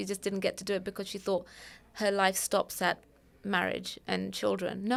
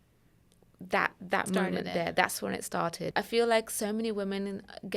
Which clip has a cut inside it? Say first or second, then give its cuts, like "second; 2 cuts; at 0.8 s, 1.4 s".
second; 1 cut; at 3.1 s